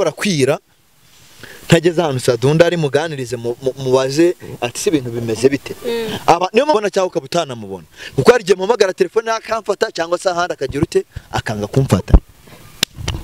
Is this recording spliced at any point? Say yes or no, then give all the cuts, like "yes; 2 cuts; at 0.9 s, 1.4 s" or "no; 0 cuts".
yes; 1 cut; at 6.7 s